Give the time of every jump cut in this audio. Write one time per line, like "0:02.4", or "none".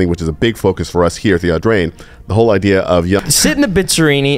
0:03.2